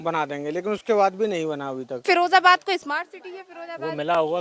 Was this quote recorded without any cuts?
no; 1 cut; at 2.0 s

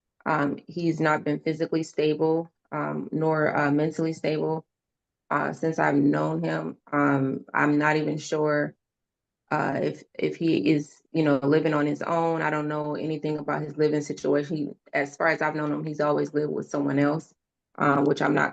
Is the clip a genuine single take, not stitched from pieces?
yes; 0 cuts

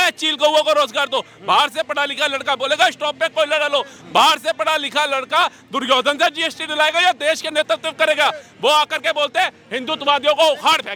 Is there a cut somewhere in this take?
no; 0 cuts

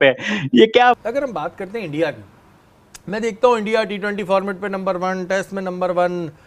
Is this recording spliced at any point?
yes; 1 cut; at 1.0 s

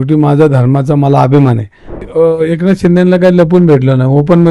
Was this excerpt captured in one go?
no; 1 cut; at 2.1 s

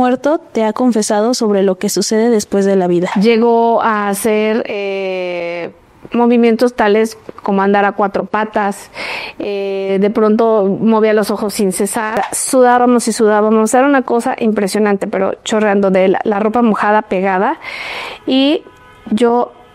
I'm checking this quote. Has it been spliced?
yes; 2 cuts; at 3.1 s, 12.2 s

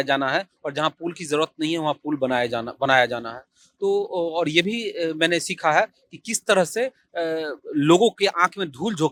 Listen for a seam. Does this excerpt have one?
no; 0 cuts

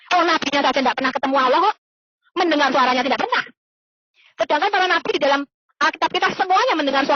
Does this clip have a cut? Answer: no; 0 cuts

